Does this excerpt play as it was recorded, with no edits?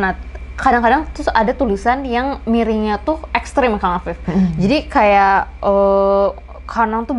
yes; 0 cuts

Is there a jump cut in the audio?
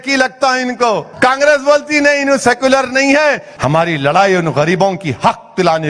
yes; 2 cuts; at 1.1 s, 3.5 s

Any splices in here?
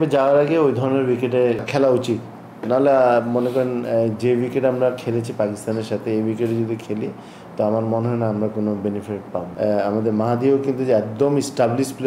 yes; 2 cuts; at 1.7 s, 9.4 s

